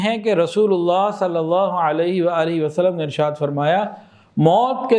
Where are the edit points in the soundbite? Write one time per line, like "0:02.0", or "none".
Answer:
none